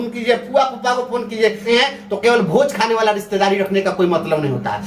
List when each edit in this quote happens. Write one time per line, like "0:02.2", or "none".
0:01.6